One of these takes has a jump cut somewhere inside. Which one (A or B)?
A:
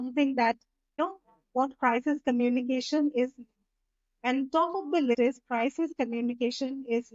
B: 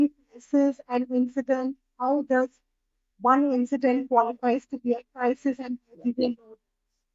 A